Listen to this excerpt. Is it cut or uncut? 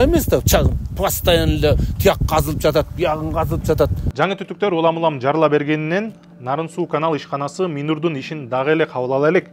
uncut